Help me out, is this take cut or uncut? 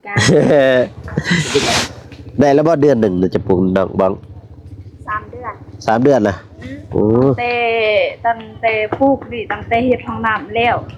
cut